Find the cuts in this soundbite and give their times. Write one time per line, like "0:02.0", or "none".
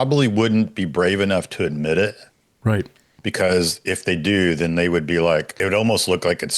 0:05.5